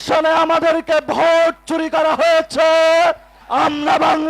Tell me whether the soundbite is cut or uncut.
cut